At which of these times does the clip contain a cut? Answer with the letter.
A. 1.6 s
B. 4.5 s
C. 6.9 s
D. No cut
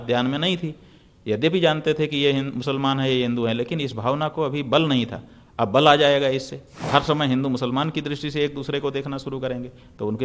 C